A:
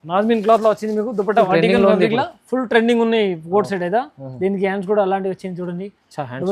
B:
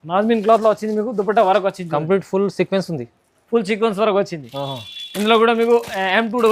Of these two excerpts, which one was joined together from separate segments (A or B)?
A